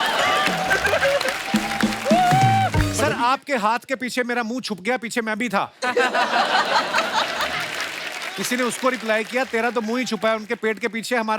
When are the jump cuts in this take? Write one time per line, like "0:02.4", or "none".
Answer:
0:02.9